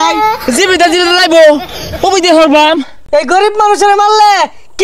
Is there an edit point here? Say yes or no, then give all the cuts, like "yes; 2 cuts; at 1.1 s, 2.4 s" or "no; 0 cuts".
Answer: yes; 1 cut; at 3.0 s